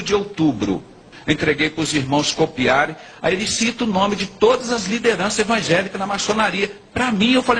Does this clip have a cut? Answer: yes; 1 cut; at 1.1 s

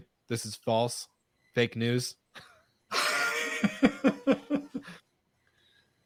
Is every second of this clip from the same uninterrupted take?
yes; 0 cuts

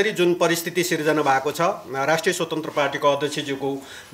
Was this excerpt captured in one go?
yes; 0 cuts

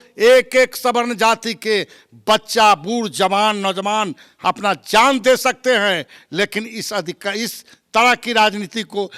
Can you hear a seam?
yes; 1 cut; at 4.3 s

